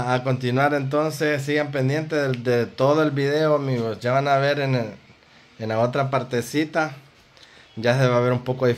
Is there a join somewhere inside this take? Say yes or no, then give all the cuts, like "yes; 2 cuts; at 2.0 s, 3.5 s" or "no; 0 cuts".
no; 0 cuts